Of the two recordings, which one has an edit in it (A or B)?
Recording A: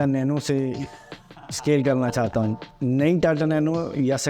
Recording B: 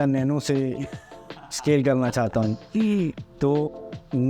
A